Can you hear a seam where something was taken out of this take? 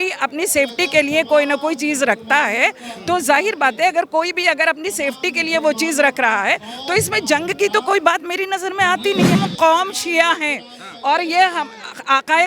yes; 1 cut; at 9.4 s

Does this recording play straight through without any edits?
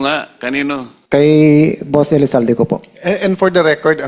no; 1 cut; at 0.9 s

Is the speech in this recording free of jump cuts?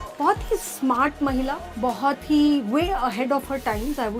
no; 1 cut; at 1.6 s

